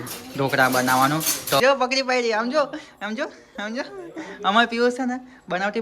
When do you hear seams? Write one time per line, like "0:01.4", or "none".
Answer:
0:01.6